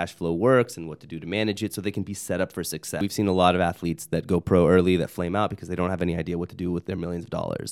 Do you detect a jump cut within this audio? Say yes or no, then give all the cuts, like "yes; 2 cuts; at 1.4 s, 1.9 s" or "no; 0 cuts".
yes; 1 cut; at 3.0 s